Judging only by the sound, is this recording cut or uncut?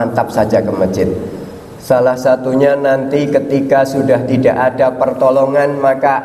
uncut